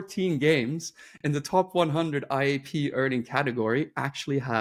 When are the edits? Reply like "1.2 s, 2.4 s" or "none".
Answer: none

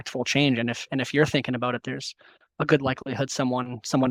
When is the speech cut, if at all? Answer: none

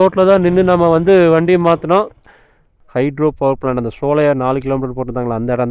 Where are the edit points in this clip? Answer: 2.8 s

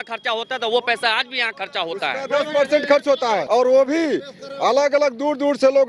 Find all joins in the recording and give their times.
3.4 s

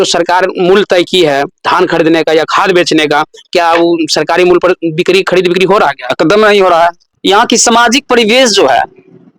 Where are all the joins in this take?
7.1 s

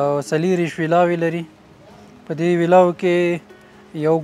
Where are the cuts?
none

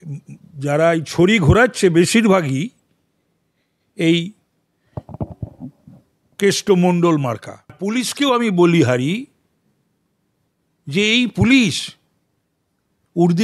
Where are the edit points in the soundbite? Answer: 7.8 s

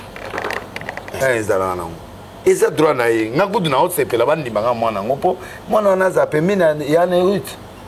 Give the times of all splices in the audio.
1.2 s

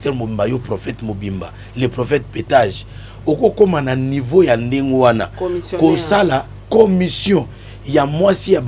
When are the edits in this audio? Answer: none

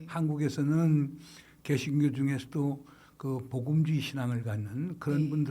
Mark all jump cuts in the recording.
none

